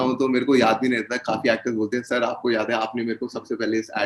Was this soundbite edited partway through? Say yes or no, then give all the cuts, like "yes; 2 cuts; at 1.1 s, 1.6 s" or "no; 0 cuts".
no; 0 cuts